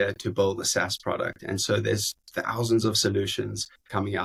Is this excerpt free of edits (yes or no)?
yes